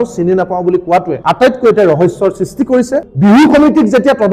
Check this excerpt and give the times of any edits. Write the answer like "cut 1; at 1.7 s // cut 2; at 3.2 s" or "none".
cut 1; at 1.1 s // cut 2; at 3.0 s